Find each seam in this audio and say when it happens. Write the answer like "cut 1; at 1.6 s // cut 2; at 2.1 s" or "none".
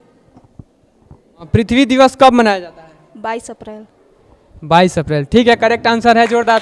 cut 1; at 1.5 s